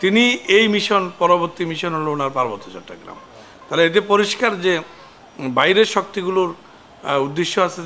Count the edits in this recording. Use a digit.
0